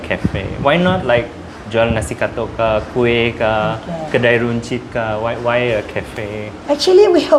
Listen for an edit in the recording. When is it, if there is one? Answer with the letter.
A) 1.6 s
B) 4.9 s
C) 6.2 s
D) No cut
D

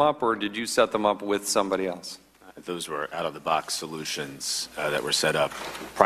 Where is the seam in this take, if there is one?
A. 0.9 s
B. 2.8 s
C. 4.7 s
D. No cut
A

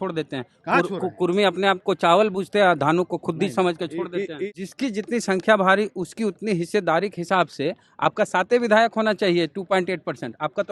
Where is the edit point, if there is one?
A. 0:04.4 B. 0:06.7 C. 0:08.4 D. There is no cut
A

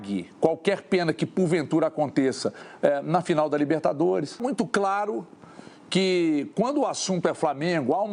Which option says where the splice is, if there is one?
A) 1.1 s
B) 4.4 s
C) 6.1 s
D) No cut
B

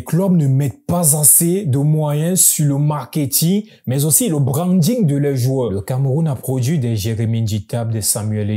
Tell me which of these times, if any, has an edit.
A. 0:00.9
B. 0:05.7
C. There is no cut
B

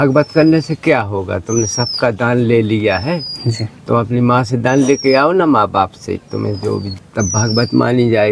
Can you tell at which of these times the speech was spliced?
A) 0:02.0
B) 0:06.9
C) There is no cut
B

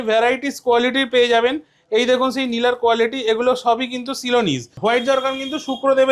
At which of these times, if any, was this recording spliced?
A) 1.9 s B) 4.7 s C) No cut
B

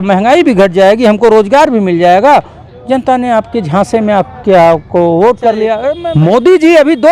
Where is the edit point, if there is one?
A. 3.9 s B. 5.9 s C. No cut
B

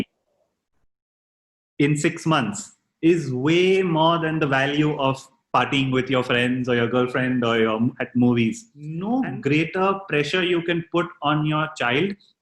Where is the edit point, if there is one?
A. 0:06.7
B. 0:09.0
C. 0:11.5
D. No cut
B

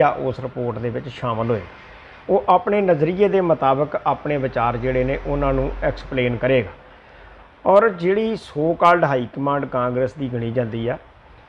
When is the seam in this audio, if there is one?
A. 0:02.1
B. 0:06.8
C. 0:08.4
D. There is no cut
D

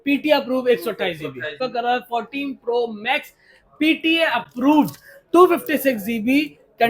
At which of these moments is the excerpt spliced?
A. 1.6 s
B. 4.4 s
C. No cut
A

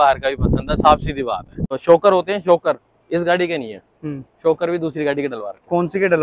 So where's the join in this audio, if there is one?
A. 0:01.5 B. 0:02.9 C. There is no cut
A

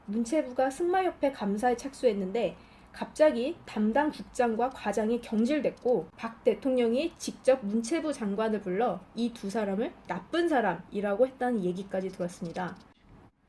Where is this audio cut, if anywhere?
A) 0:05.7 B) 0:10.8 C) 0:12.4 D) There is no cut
A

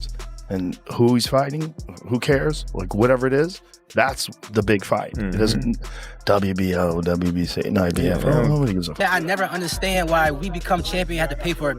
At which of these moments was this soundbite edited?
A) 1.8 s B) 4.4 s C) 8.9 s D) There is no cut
C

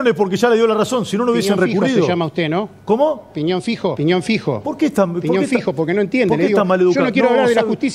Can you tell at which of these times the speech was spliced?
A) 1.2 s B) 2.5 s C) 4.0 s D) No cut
C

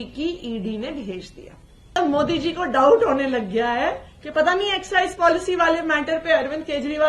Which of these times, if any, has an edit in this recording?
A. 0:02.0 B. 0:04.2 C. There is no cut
A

